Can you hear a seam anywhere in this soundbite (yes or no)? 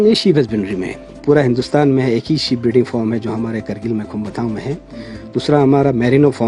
yes